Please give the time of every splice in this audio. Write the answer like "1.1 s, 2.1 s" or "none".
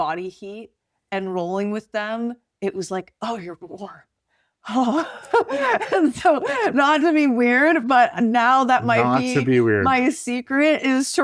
none